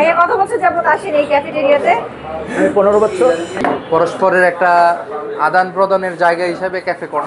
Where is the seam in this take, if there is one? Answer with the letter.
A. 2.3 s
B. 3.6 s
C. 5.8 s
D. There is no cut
B